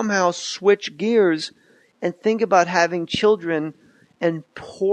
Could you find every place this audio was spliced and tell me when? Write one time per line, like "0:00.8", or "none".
0:03.0